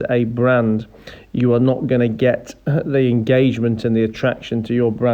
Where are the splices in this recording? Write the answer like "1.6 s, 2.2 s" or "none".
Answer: 2.5 s